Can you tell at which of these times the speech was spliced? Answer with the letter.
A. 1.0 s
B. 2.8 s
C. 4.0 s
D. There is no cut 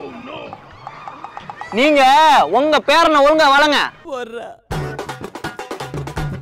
C